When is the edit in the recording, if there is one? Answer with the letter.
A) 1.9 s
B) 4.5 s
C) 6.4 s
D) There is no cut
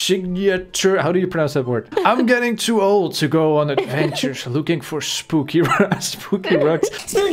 A